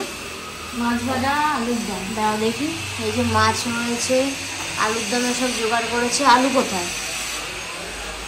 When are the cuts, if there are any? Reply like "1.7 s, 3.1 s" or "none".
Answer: none